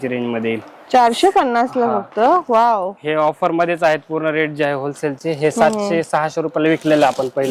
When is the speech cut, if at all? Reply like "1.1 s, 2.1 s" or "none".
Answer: none